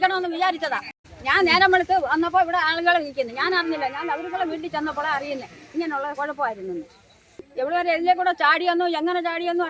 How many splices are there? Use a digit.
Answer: 2